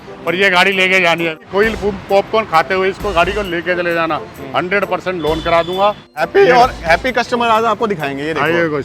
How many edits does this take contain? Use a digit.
2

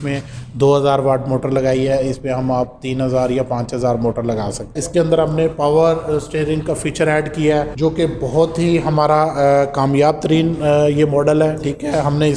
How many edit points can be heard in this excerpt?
1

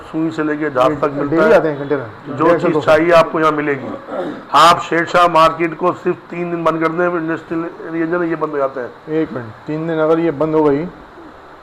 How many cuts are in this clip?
0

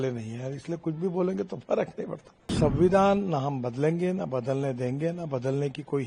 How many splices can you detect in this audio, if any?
1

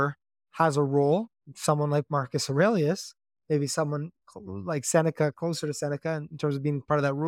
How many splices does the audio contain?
0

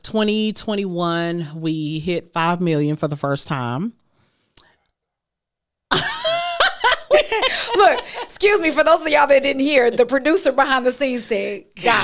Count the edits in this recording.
0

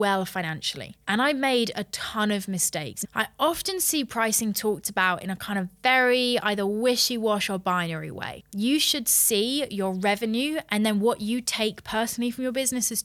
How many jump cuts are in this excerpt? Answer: 3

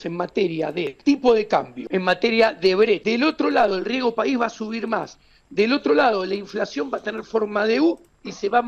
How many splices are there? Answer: 3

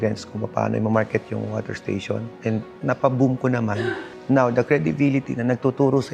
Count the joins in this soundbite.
1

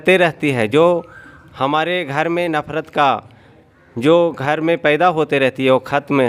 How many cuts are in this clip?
0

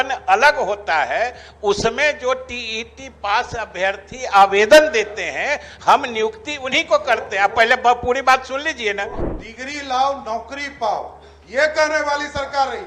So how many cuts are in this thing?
1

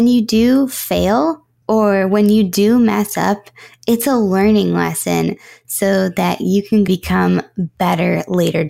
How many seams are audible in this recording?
1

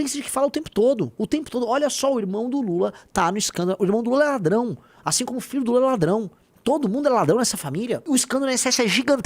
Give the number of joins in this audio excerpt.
2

